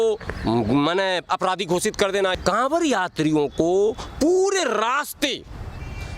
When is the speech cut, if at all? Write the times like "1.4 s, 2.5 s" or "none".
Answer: 2.3 s

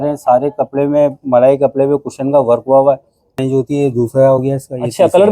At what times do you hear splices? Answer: 3.3 s

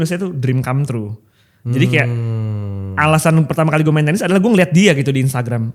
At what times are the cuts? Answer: none

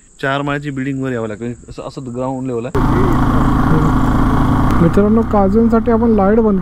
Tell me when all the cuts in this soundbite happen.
2.8 s, 4.7 s

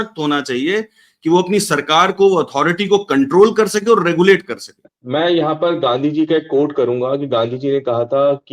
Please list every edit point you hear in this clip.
4.9 s

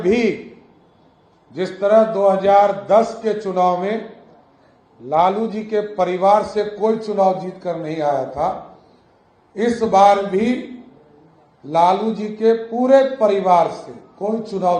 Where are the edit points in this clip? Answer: none

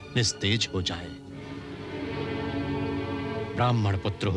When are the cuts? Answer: none

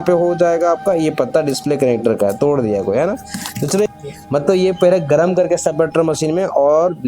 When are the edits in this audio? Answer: 3.9 s

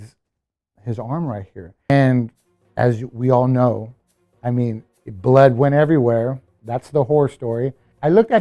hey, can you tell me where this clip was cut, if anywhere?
1.9 s

